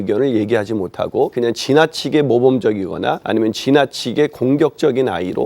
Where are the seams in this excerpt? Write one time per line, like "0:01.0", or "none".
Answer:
0:01.3
0:03.2